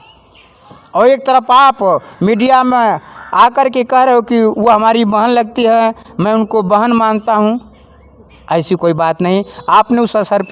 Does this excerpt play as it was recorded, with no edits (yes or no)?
yes